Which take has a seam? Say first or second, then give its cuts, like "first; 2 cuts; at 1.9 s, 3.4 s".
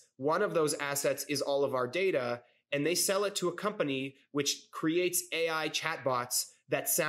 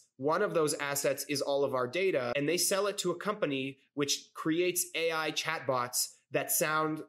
second; 1 cut; at 2.3 s